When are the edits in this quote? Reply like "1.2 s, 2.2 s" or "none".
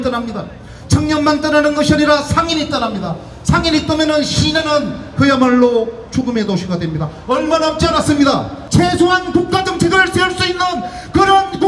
8.6 s